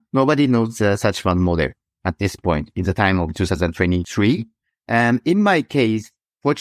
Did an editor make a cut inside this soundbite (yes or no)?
yes